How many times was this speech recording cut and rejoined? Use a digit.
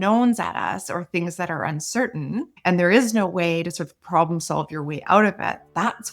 1